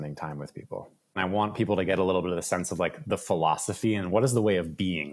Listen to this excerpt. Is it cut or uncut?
cut